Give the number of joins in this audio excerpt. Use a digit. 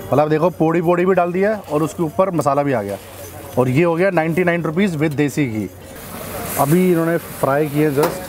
1